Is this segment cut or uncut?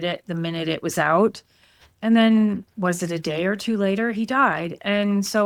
uncut